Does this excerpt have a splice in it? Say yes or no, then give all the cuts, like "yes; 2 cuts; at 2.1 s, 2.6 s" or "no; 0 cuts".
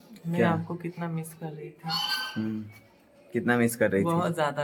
no; 0 cuts